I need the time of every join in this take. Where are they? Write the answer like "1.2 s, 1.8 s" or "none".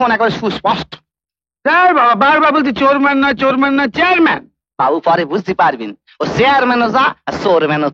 none